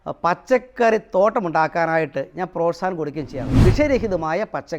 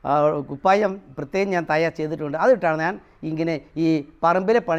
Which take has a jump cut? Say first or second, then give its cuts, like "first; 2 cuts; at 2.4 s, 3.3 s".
first; 1 cut; at 3.6 s